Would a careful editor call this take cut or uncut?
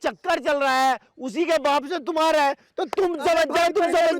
uncut